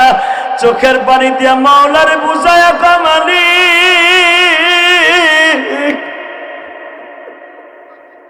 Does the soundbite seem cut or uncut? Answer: uncut